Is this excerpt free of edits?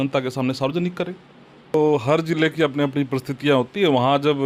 no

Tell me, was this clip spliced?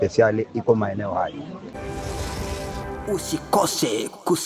yes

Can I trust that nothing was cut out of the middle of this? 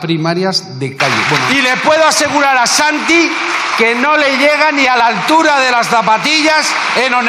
no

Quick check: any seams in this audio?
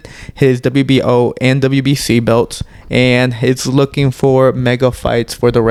no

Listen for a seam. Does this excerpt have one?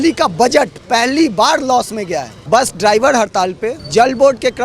yes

